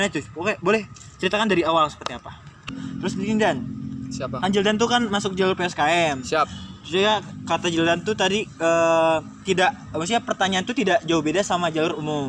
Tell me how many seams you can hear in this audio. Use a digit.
1